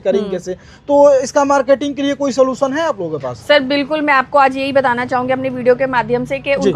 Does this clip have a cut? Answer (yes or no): no